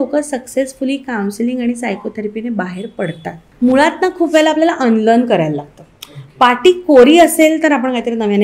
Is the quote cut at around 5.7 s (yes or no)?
no